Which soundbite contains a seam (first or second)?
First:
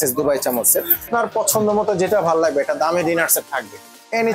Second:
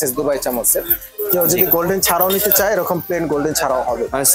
first